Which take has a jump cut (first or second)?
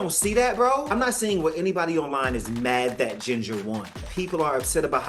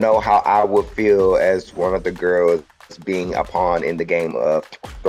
first